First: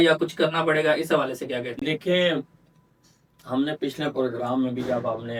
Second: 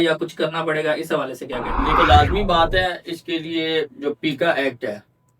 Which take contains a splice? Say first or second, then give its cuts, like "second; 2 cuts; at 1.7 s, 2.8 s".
second; 1 cut; at 1.9 s